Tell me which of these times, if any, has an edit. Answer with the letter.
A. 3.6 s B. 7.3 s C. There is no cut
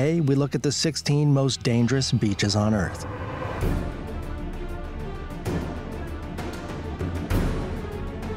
C